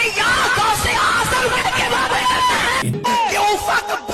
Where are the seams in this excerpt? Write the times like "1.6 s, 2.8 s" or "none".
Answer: 3.0 s

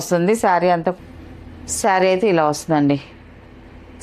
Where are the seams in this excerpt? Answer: 0.9 s

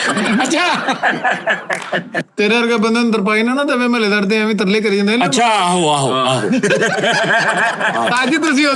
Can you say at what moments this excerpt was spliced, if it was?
2.1 s

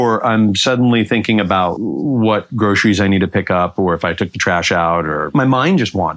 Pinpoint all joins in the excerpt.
1.7 s, 5.3 s

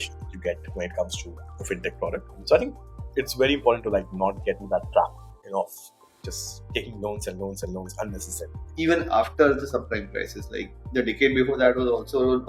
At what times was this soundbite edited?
2.4 s, 8.7 s

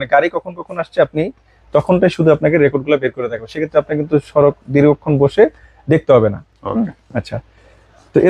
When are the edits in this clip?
none

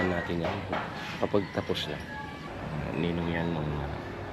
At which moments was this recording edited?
2.4 s

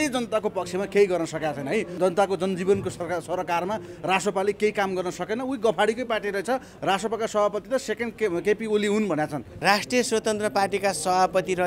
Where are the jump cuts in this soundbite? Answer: 2.0 s, 9.4 s

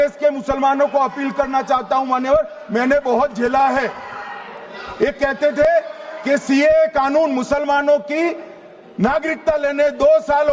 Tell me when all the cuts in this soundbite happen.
none

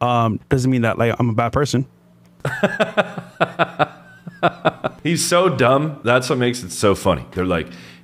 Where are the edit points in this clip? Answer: none

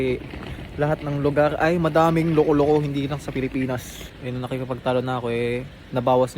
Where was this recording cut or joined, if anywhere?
4.1 s

